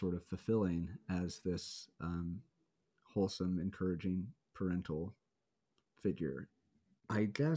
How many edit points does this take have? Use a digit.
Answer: 1